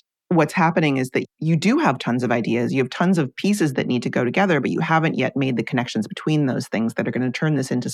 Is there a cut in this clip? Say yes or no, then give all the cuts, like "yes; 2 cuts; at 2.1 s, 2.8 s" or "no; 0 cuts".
no; 0 cuts